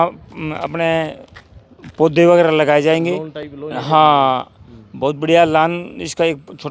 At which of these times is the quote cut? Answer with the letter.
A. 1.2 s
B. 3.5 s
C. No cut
C